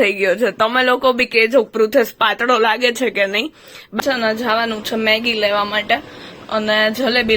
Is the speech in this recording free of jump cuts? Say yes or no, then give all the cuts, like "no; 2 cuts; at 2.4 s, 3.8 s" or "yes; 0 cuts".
no; 1 cut; at 4.0 s